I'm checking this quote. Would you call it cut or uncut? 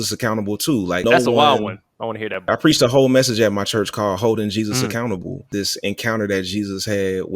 cut